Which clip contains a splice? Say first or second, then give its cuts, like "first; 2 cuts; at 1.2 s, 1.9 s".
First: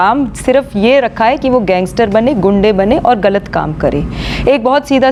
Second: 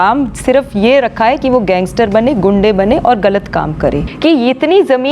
second; 1 cut; at 4.1 s